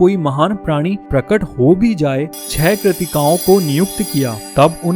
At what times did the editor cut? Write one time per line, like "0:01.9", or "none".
0:02.3